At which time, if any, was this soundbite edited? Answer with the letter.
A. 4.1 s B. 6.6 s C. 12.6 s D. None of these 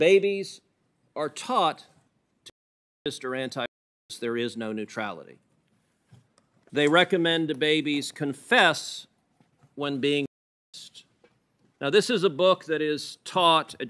B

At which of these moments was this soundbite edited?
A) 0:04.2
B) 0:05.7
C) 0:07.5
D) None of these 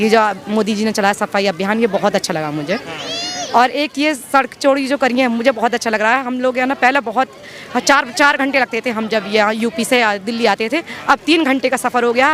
D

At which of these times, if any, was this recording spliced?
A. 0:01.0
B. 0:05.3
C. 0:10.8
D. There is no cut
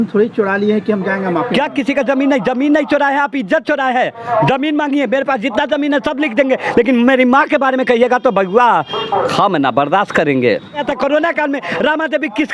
C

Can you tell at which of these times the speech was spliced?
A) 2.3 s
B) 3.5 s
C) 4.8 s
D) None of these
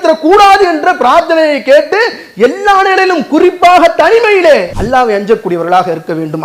C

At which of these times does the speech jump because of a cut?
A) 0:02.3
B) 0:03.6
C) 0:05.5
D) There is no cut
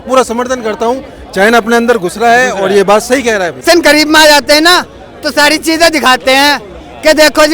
B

